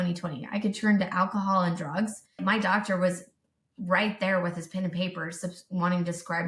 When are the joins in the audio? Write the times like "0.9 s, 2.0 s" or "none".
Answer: 2.4 s